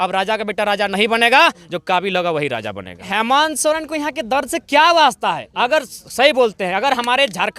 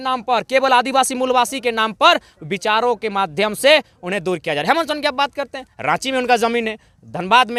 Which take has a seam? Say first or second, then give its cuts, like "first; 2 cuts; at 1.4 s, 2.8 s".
first; 1 cut; at 3.1 s